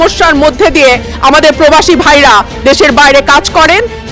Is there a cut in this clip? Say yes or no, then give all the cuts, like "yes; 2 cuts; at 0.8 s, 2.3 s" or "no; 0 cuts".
no; 0 cuts